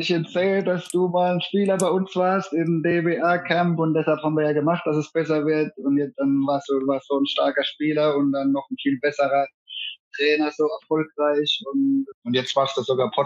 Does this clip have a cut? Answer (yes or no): no